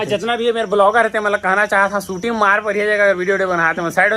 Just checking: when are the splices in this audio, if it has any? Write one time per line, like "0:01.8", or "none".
none